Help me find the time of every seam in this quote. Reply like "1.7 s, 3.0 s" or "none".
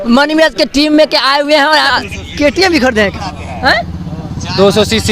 1.9 s